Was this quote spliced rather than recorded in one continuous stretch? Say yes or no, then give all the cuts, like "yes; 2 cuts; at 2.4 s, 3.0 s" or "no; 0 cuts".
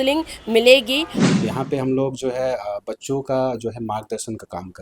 yes; 1 cut; at 1.1 s